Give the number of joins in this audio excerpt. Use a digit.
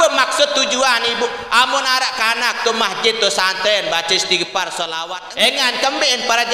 1